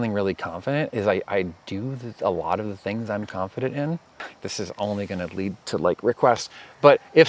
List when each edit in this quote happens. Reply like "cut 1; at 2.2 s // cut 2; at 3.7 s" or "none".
cut 1; at 4.2 s

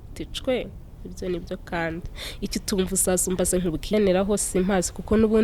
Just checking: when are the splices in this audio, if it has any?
cut 1; at 3.9 s

